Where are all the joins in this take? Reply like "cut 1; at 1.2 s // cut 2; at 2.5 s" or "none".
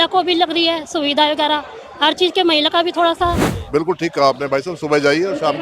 cut 1; at 3.5 s